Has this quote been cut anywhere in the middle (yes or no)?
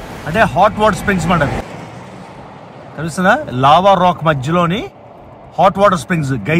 yes